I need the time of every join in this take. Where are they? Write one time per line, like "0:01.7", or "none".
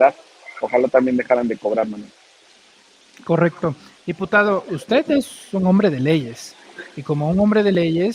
none